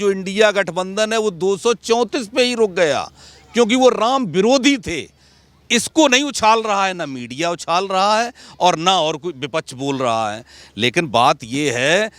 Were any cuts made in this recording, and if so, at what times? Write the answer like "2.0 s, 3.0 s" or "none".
none